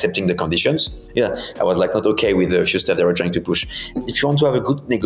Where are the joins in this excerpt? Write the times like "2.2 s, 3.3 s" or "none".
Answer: 1.0 s, 4.0 s